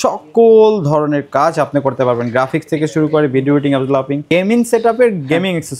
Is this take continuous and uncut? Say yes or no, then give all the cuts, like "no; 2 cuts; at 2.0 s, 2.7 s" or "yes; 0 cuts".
no; 1 cut; at 4.2 s